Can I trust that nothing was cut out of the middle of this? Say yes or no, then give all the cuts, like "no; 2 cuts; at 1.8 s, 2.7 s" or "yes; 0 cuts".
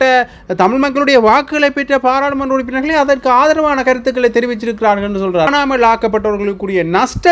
no; 1 cut; at 5.5 s